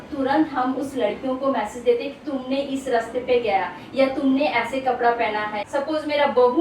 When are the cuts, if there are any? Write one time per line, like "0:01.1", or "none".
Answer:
0:05.6